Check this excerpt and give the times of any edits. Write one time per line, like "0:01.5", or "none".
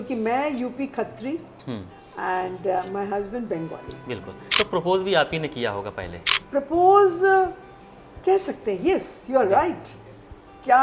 0:04.4